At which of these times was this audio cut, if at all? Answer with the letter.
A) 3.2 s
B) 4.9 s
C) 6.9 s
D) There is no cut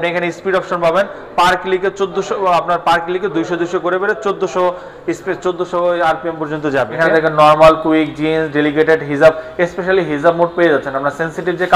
C